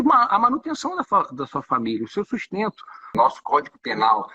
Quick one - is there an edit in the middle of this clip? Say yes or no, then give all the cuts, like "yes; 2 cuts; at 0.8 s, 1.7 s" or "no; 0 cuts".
yes; 1 cut; at 3.1 s